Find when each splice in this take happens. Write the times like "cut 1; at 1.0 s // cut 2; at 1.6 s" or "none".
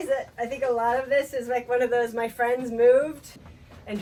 none